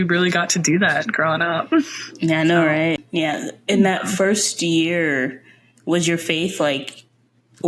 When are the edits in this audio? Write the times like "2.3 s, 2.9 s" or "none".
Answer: 3.0 s

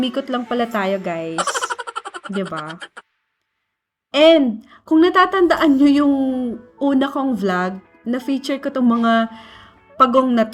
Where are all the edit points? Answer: none

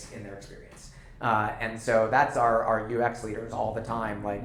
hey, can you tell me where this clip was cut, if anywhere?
none

